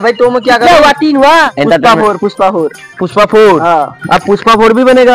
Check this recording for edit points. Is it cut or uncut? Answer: cut